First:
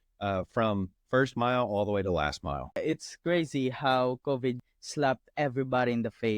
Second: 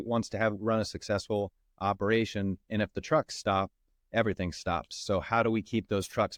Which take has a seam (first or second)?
first